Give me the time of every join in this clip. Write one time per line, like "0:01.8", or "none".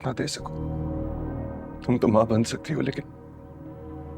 0:01.6

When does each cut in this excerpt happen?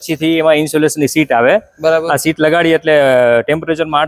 none

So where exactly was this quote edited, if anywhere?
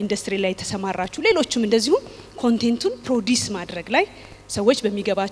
none

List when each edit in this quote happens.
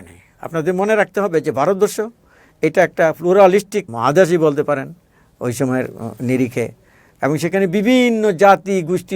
0:03.9

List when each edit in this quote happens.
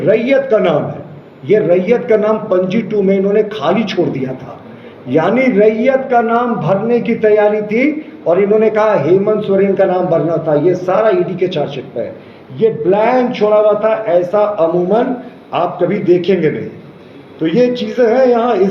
none

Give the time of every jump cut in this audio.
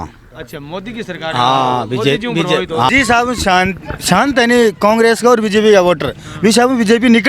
0:02.9

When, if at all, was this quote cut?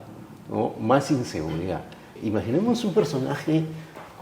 0:02.2

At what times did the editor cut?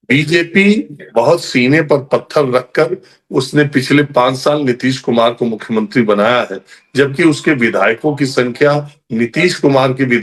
none

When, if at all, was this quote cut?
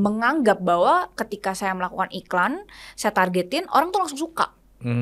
none

